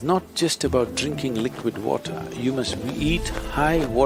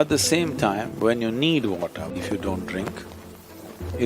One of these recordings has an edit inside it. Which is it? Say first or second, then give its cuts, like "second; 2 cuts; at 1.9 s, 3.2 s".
second; 1 cut; at 2.1 s